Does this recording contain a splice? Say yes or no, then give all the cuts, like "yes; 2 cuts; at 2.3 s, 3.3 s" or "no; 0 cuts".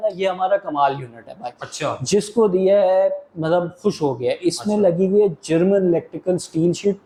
no; 0 cuts